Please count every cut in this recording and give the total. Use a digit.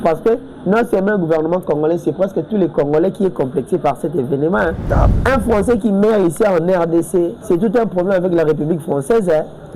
2